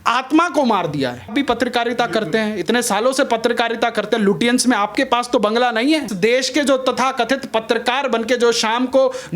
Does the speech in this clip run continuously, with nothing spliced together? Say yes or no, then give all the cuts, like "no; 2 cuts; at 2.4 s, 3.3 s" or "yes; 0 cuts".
no; 2 cuts; at 1.3 s, 6.1 s